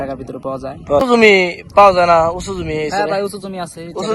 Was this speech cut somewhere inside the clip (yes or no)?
yes